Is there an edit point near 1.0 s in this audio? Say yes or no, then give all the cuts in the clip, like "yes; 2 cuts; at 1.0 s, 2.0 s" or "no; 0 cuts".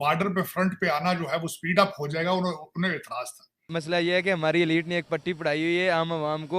no; 1 cut; at 3.7 s